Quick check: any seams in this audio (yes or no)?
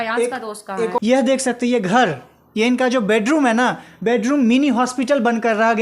yes